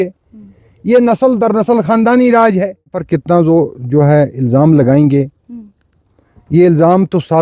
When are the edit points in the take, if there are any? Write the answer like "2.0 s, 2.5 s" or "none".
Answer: 3.0 s